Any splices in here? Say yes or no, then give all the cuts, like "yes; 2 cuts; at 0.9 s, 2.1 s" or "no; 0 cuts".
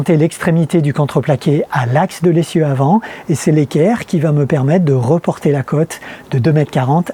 no; 0 cuts